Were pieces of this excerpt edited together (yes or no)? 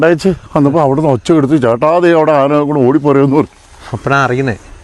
no